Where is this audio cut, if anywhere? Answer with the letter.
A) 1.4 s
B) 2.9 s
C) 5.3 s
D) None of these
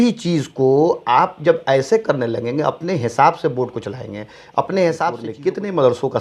C